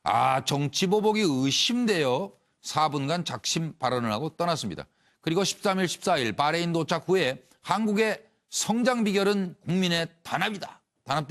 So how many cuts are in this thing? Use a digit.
1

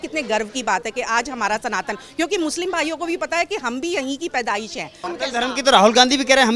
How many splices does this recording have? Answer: 1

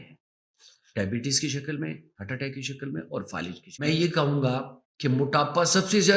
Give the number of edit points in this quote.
1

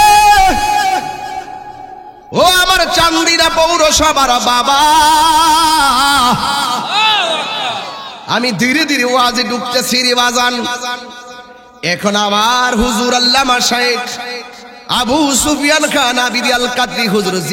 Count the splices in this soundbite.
0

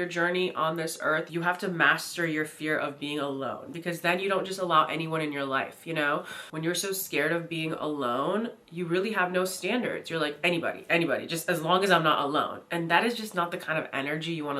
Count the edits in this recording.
1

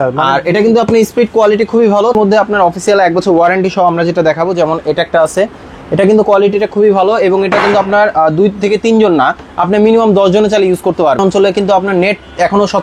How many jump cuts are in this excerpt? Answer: 2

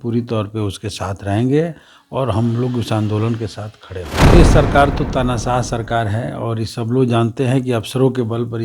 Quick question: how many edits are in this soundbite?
1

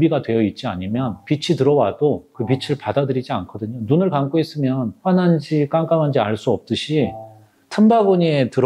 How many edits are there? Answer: 0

